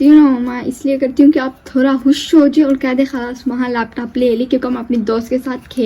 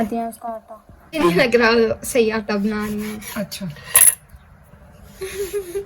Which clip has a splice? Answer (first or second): second